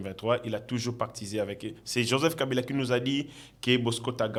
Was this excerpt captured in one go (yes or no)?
yes